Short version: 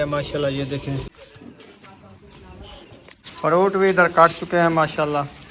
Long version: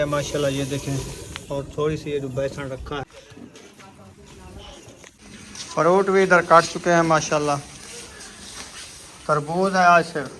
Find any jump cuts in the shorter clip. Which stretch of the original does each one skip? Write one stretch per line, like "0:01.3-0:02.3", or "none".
0:01.3-0:03.2
0:05.2-0:05.6

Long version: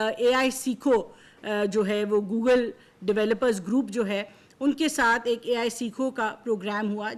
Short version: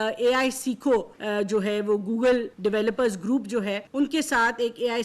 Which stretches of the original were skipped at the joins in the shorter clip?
0:01.2-0:01.4
0:02.7-0:02.9
0:04.3-0:04.5

